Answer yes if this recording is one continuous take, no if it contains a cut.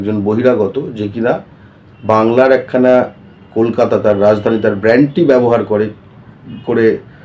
yes